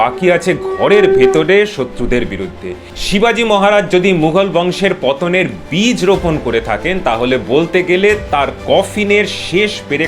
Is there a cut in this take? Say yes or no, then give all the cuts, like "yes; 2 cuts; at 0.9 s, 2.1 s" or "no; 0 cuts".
yes; 1 cut; at 2.9 s